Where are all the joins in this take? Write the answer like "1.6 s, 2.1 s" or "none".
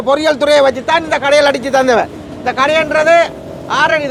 none